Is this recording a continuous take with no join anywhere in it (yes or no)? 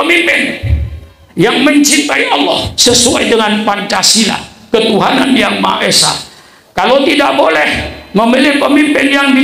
no